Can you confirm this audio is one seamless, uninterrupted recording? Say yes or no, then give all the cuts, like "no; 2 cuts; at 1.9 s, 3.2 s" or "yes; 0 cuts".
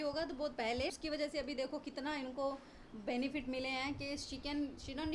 no; 1 cut; at 0.9 s